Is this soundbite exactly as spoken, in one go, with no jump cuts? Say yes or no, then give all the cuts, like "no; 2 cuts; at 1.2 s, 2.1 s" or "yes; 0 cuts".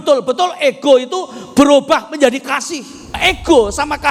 no; 1 cut; at 3.2 s